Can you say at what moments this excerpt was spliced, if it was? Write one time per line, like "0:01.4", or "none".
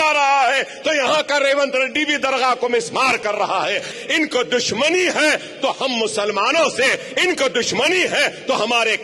0:03.9